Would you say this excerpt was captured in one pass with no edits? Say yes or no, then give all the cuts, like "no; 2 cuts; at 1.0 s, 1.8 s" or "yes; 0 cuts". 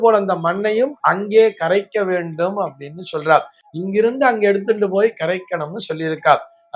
yes; 0 cuts